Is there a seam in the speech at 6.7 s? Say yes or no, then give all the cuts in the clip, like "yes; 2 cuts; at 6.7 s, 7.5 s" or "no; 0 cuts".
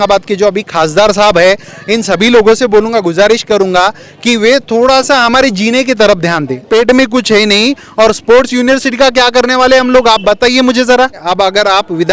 yes; 2 cuts; at 6.7 s, 11.2 s